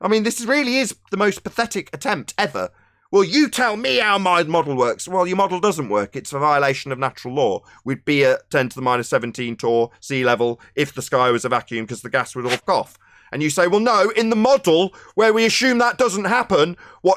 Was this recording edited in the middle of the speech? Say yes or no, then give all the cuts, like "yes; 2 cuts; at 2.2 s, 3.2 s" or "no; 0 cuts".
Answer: yes; 1 cut; at 12.6 s